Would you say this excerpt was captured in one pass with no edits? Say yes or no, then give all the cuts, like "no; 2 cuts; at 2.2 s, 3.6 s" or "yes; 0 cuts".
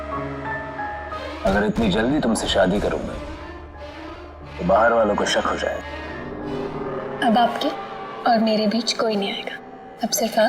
no; 2 cuts; at 1.2 s, 6.3 s